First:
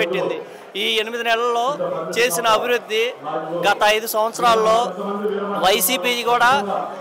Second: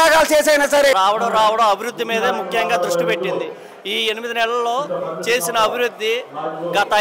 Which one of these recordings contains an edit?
second; 1 cut; at 0.9 s

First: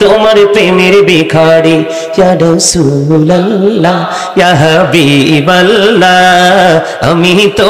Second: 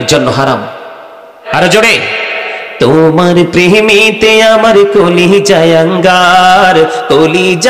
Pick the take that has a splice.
second; 1 cut; at 1.5 s

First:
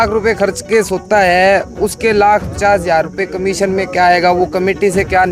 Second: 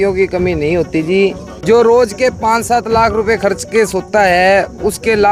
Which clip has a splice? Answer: second; 1 cut; at 1.5 s

